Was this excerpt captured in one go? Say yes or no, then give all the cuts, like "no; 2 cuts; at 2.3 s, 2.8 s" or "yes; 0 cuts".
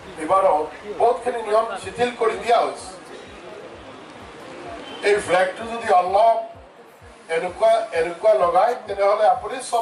yes; 0 cuts